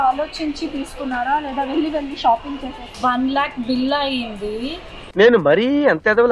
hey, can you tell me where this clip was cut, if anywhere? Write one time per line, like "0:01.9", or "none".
0:03.0